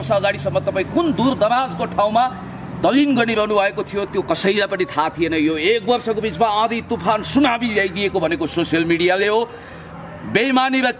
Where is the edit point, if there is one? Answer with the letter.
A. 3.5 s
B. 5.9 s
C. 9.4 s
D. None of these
D